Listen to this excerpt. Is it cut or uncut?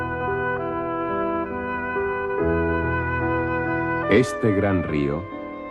uncut